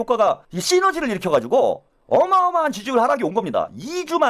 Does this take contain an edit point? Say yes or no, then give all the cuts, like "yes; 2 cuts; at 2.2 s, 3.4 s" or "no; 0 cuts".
yes; 1 cut; at 1.9 s